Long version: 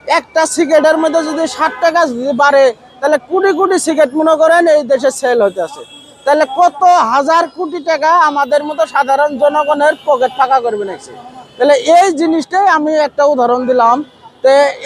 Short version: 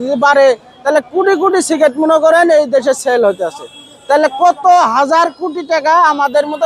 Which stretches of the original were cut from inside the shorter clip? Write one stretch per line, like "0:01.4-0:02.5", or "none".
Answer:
none